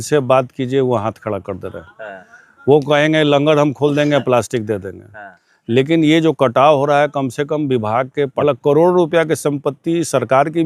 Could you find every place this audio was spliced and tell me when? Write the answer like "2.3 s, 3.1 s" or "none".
8.4 s